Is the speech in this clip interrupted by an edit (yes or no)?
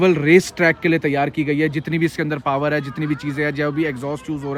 no